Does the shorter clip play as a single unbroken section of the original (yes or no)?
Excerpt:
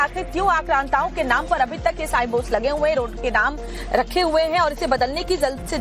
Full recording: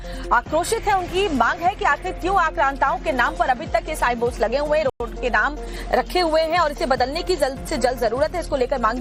no